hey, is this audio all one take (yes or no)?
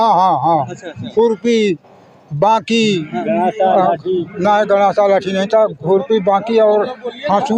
yes